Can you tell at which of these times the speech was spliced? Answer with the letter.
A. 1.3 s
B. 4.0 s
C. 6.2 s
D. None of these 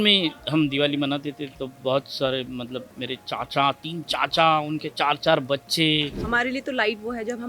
C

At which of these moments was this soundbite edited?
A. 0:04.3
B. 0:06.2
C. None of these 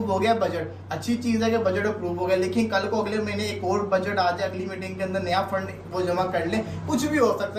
C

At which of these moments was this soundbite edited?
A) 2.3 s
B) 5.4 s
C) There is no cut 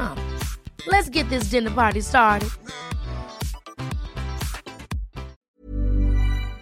B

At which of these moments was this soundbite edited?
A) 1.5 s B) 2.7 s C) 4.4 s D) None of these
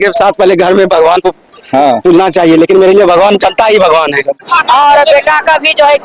C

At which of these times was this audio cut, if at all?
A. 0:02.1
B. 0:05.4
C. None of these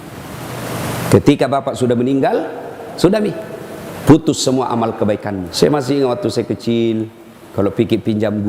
B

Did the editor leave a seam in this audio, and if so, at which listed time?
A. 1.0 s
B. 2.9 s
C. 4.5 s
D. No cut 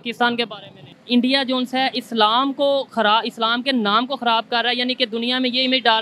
A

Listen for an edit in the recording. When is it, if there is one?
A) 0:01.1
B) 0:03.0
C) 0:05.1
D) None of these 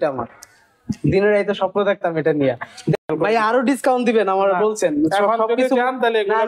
B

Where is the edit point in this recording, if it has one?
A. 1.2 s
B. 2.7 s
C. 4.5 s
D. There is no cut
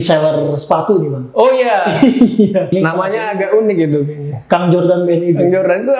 B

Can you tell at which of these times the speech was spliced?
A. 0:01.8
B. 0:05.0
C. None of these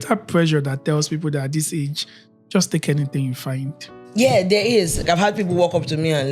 B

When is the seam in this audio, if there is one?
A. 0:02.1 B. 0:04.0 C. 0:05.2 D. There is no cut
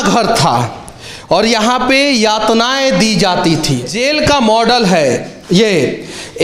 B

